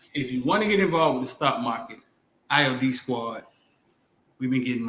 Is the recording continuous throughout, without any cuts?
no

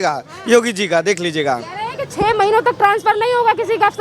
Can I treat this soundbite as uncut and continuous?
yes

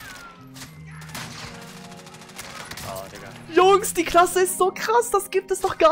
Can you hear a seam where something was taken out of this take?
no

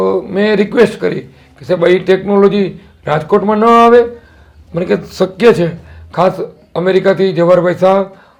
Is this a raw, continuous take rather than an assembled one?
yes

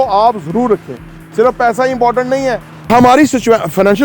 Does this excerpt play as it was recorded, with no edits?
no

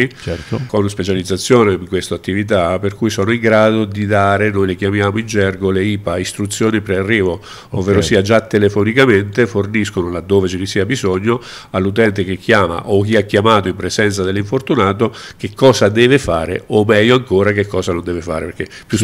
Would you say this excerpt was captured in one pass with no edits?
yes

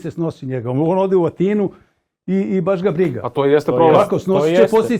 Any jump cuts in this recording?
no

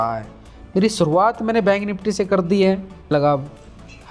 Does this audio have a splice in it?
yes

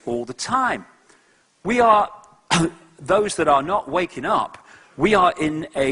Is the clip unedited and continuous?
yes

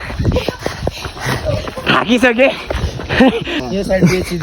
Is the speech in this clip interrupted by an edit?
yes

